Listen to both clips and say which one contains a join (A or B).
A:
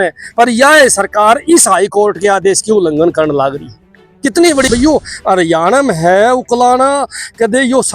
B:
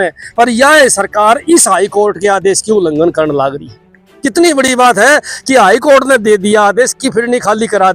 A